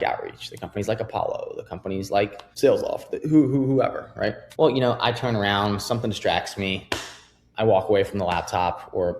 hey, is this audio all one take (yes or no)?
no